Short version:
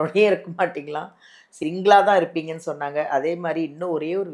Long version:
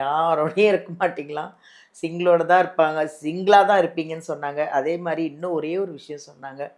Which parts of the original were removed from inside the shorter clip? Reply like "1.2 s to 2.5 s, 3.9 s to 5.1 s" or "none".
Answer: 2.0 s to 3.2 s